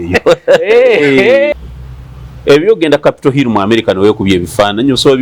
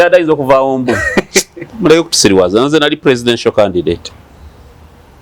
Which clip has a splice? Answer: first; 1 cut; at 1.5 s

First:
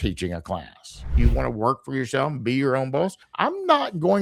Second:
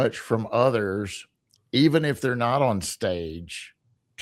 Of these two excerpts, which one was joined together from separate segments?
first; 2 cuts; at 1.1 s, 3.2 s

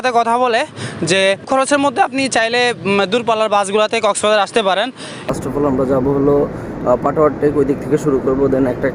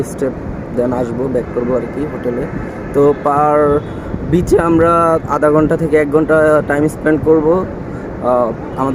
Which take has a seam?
first; 2 cuts; at 1.4 s, 5.2 s

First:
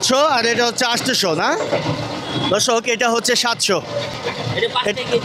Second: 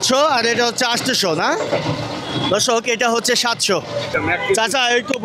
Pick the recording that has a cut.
second; 1 cut; at 4.1 s

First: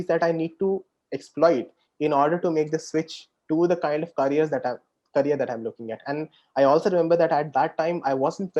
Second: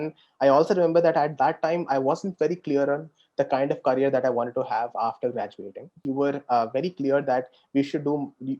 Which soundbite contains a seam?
second; 1 cut; at 6.0 s

